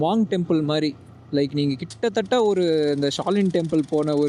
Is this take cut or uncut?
uncut